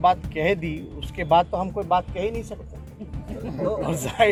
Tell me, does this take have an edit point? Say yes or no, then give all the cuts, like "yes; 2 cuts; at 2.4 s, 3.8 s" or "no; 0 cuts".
no; 0 cuts